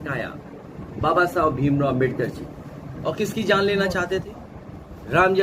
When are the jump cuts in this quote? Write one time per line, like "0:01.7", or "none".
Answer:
0:02.9